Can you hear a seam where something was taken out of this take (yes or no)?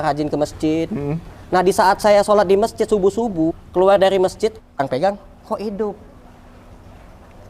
yes